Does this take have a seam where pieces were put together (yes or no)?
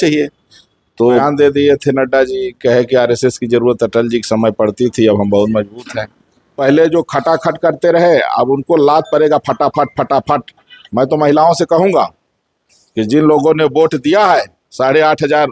yes